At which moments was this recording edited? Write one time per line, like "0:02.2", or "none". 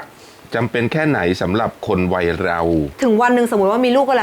0:02.9